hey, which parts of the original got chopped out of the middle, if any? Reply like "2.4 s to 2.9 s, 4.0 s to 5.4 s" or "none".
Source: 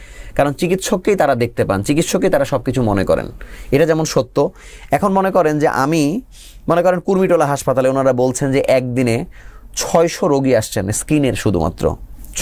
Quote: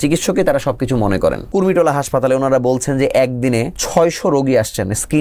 3.3 s to 7.0 s, 9.3 s to 9.7 s